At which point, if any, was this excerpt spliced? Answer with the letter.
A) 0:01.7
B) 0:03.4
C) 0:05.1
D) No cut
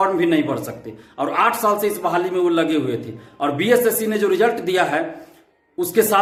D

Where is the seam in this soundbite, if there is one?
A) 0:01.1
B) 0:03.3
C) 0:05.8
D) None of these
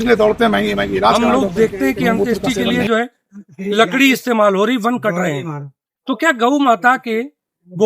A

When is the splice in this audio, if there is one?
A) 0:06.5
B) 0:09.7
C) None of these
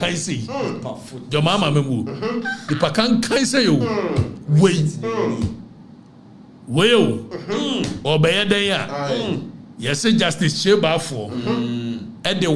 C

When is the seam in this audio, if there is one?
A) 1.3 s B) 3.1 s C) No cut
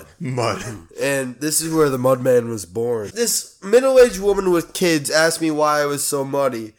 B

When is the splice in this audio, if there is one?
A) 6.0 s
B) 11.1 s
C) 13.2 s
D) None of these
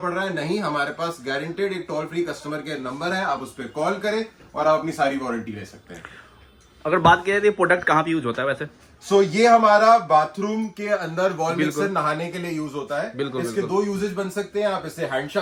D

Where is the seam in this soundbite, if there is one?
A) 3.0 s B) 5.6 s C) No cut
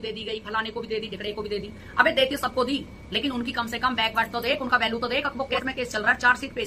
B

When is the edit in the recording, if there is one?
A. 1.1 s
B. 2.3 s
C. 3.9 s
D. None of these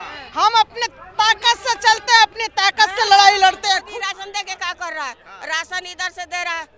C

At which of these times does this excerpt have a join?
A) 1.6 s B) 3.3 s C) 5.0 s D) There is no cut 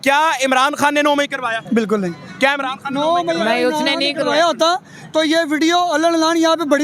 A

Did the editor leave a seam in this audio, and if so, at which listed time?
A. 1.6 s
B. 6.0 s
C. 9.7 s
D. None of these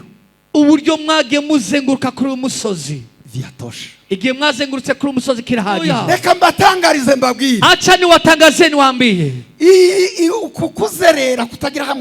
B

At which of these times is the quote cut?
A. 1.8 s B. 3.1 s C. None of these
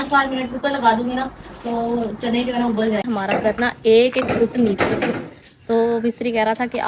B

